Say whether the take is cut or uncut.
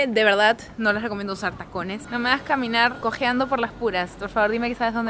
cut